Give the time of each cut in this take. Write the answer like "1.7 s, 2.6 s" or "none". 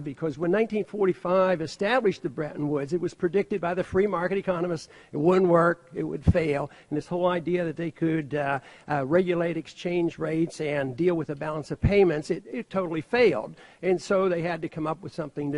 12.5 s

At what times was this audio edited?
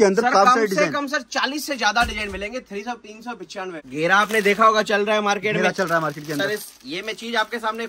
3.8 s

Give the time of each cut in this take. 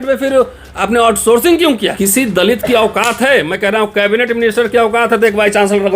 1.9 s

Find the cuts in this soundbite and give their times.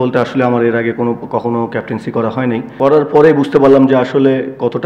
2.7 s

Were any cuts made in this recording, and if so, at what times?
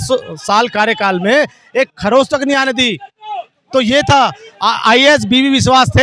none

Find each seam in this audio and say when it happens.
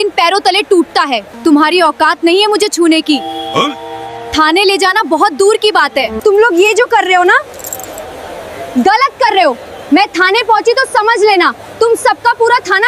1.3 s, 6.2 s

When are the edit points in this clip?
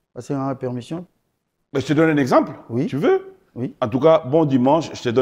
1.0 s

